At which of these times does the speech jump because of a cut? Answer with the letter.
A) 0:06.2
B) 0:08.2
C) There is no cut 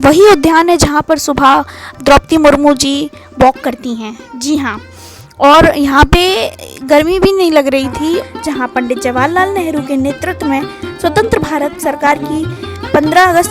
B